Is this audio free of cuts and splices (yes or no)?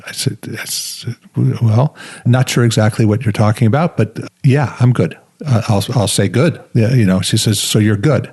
no